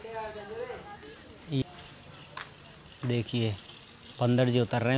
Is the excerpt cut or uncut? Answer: cut